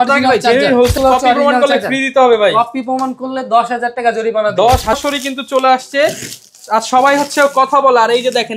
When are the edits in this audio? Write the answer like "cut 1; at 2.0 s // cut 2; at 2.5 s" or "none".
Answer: cut 1; at 0.9 s // cut 2; at 4.9 s